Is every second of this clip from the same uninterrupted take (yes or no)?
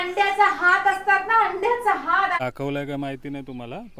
no